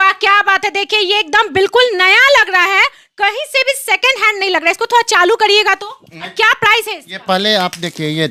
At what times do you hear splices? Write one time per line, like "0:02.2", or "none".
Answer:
none